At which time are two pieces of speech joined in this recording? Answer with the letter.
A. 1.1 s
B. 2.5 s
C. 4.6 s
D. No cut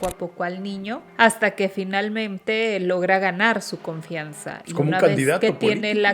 A